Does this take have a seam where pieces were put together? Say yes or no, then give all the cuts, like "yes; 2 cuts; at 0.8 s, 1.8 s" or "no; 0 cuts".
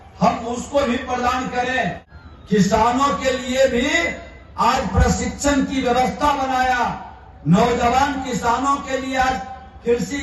yes; 1 cut; at 2.1 s